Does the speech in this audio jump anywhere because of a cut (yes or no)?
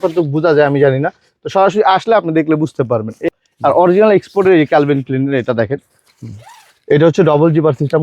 yes